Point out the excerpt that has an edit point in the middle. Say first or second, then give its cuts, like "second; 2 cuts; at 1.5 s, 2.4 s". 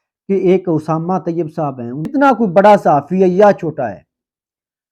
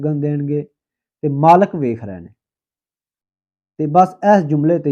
first; 1 cut; at 2.1 s